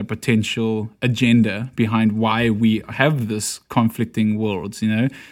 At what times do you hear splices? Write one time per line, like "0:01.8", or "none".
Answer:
none